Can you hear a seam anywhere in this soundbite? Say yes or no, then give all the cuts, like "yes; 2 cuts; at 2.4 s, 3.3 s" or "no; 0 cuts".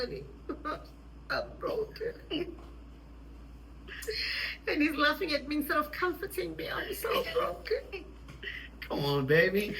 no; 0 cuts